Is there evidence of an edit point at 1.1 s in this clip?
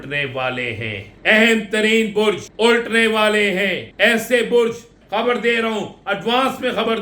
yes; 4 cuts; at 1.1 s, 2.5 s, 3.8 s, 5.0 s

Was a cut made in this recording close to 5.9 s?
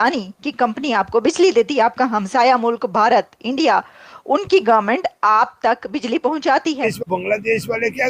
no; 1 cut; at 7.2 s

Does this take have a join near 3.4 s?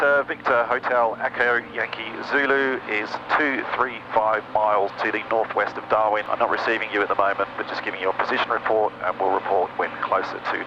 no; 2 cuts; at 5.0 s, 6.3 s

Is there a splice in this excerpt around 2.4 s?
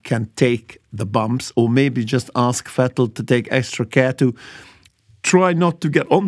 no; 1 cut; at 4.8 s

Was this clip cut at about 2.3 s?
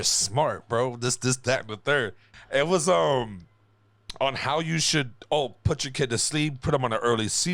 yes; 1 cut; at 2.3 s

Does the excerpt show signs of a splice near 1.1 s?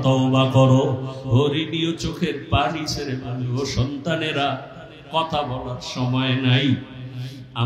yes; 1 cut; at 1.1 s

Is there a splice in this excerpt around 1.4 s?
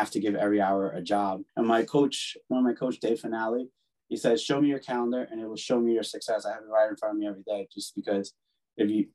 yes; 1 cut; at 1.4 s

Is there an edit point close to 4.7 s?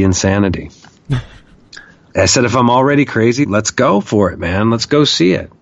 no; 2 cuts; at 2.1 s, 3.5 s

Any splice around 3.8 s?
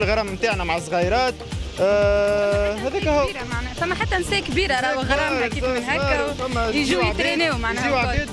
no; 0 cuts

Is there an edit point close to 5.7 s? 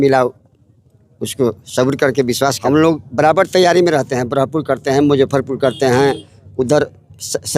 no; 1 cut; at 2.6 s

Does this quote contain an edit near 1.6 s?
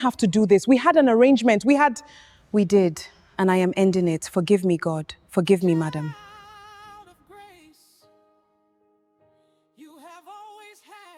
no; 0 cuts

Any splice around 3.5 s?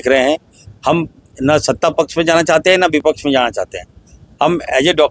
no; 0 cuts

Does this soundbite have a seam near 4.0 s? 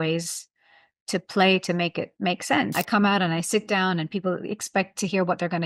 no; 1 cut; at 2.7 s

